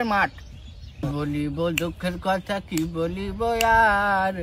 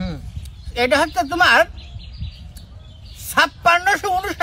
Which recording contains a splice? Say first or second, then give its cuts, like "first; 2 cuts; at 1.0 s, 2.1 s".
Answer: first; 1 cut; at 1.0 s